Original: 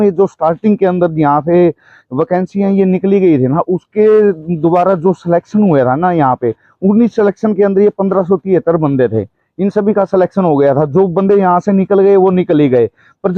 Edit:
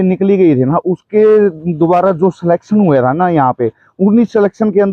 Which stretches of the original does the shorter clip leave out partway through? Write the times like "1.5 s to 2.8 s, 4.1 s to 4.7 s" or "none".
none